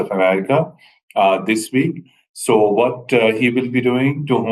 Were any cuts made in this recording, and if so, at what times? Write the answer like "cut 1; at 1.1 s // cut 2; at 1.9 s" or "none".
none

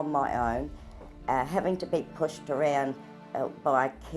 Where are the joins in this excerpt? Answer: none

